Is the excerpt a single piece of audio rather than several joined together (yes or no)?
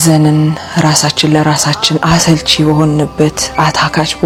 yes